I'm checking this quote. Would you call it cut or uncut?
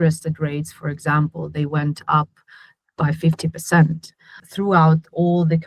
cut